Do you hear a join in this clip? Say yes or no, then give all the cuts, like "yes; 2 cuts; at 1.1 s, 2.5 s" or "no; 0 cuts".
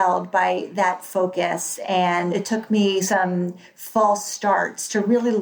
yes; 1 cut; at 2.3 s